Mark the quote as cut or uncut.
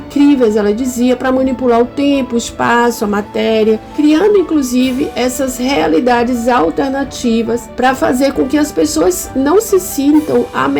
uncut